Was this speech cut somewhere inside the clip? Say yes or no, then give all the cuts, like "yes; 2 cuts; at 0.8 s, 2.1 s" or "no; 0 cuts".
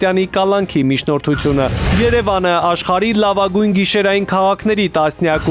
yes; 1 cut; at 1.9 s